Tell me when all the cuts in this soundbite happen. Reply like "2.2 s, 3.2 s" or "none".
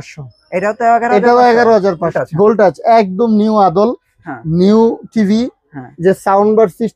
2.2 s